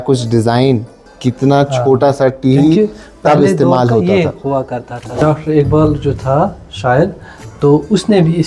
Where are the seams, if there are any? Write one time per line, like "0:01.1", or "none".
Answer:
0:05.2